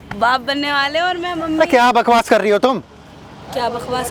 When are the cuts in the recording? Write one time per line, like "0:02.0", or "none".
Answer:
none